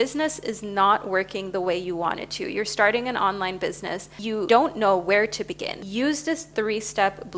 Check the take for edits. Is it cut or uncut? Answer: cut